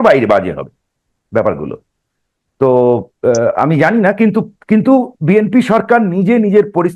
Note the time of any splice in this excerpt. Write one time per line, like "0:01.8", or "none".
none